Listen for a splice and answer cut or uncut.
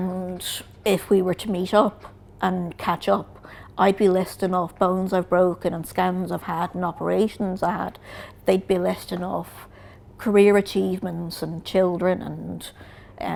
uncut